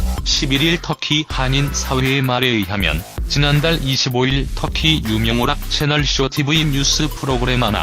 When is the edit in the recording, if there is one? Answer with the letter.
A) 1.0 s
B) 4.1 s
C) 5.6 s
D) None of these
A